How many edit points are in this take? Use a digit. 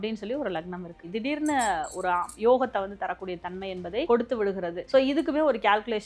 3